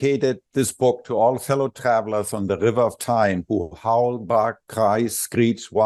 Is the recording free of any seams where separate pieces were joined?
yes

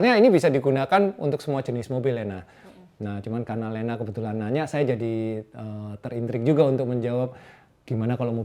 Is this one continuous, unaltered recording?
yes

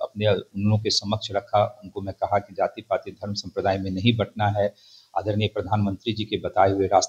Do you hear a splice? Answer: no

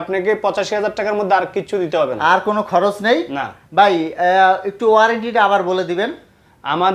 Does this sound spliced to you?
no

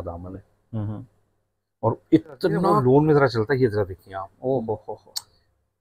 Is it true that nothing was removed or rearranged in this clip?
no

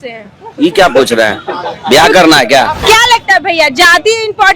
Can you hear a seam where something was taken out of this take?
yes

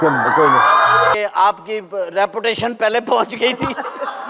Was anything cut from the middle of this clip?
yes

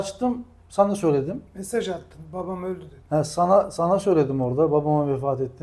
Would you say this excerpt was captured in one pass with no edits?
yes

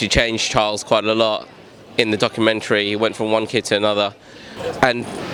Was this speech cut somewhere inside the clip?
no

